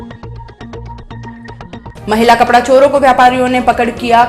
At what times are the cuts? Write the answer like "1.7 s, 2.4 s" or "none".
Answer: none